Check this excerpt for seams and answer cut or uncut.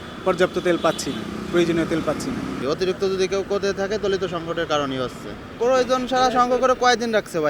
uncut